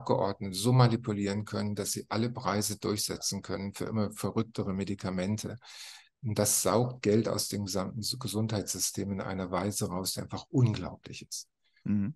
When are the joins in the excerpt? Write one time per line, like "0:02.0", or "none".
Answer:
none